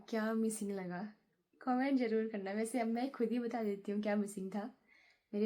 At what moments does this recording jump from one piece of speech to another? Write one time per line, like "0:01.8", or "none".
none